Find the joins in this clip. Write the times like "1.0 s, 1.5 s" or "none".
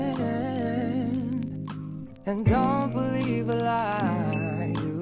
none